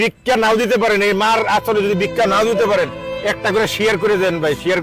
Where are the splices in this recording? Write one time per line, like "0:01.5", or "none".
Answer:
none